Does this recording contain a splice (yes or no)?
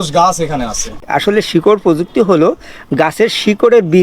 yes